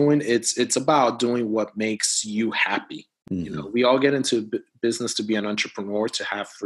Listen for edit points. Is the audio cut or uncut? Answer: uncut